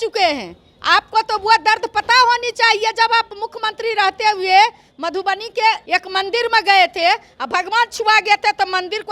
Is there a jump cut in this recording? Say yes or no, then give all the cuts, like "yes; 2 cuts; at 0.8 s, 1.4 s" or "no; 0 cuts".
yes; 1 cut; at 5.8 s